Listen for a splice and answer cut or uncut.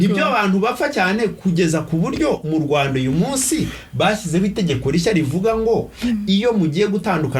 uncut